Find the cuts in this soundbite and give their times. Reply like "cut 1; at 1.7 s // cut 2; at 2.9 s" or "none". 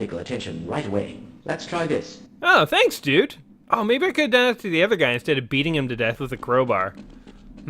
cut 1; at 6.2 s